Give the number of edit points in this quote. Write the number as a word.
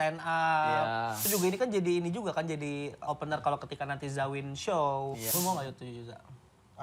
three